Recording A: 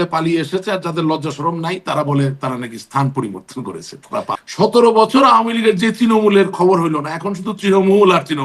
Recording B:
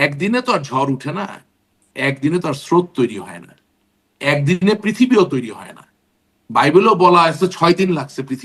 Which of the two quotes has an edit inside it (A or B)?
A